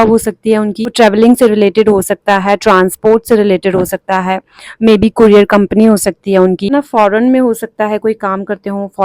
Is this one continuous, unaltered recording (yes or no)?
no